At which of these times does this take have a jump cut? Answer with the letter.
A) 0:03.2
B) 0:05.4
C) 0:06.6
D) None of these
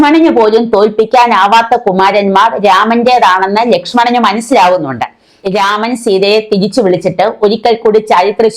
B